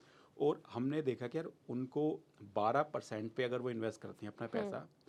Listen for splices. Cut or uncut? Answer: uncut